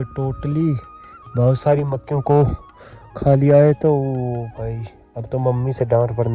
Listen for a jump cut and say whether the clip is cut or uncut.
uncut